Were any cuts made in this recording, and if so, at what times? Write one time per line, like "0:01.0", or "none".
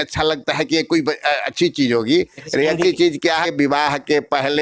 0:03.4